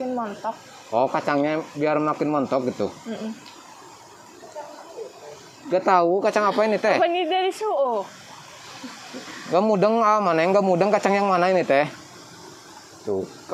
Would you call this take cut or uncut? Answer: uncut